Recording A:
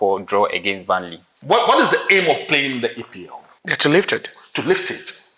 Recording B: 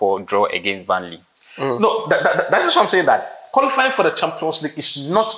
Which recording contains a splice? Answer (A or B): A